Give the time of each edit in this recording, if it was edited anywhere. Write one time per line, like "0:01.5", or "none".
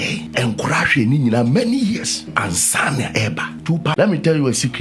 0:03.9